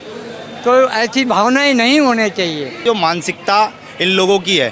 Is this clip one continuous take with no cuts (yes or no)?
no